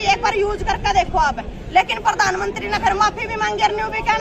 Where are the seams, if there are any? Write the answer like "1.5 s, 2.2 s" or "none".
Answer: none